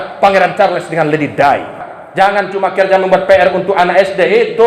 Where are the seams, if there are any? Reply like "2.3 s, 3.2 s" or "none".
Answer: 2.0 s